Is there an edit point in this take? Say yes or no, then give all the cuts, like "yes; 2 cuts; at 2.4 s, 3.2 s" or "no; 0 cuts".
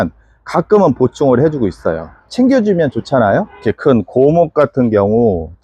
yes; 1 cut; at 3.6 s